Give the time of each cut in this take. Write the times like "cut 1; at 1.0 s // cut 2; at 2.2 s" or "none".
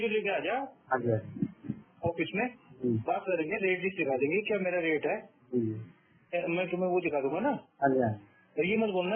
none